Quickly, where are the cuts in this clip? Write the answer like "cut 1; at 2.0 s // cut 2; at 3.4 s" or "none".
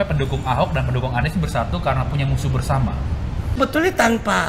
cut 1; at 3.6 s